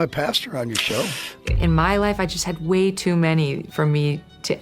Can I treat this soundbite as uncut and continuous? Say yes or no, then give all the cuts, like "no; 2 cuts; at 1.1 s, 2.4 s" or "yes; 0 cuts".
no; 1 cut; at 1.5 s